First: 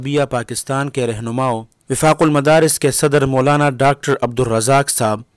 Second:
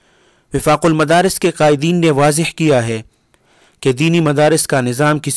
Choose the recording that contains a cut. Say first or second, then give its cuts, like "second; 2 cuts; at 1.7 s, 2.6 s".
first; 1 cut; at 1.7 s